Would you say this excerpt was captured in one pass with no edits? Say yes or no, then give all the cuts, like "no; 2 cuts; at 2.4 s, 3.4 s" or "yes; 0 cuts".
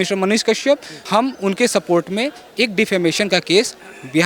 no; 1 cut; at 0.9 s